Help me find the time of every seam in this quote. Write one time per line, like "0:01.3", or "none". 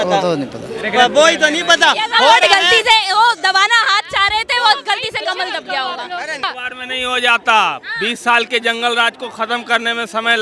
0:06.3